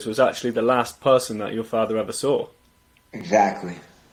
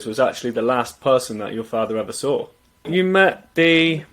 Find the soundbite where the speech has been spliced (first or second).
second